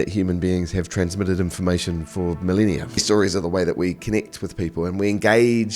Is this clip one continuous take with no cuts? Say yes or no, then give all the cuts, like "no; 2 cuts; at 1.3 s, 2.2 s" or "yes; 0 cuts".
no; 1 cut; at 3.0 s